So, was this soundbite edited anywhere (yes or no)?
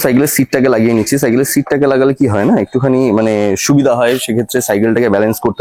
no